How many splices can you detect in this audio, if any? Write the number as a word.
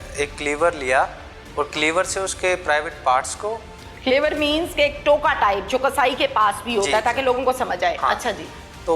zero